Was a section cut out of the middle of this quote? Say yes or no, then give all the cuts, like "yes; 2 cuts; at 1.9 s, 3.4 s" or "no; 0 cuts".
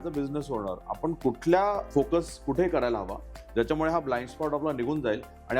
yes; 1 cut; at 1.8 s